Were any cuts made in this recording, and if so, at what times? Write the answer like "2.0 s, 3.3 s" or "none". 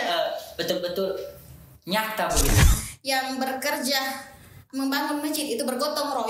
2.6 s